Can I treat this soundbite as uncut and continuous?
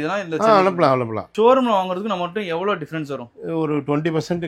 no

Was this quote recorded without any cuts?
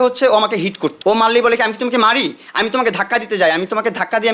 no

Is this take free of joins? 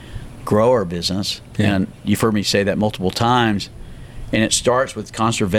yes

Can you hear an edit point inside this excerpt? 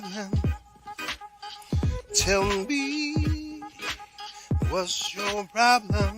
no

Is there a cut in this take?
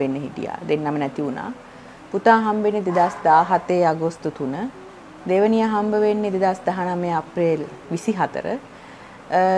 no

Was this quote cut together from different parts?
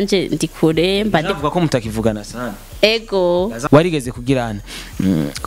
yes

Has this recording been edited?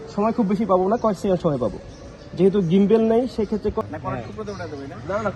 yes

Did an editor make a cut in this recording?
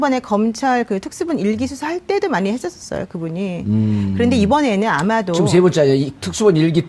yes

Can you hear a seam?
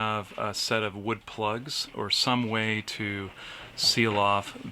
no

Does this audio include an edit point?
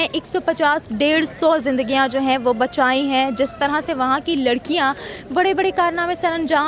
no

